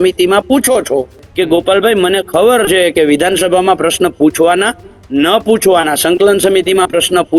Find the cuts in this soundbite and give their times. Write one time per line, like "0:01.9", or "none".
0:01.2